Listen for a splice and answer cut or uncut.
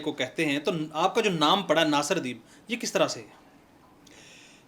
uncut